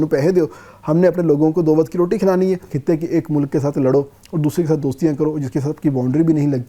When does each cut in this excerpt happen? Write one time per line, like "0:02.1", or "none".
0:02.7